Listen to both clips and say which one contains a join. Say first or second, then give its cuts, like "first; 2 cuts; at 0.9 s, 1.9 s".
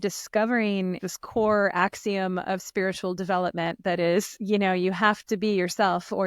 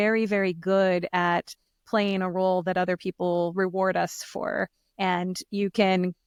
first; 2 cuts; at 1.1 s, 4.4 s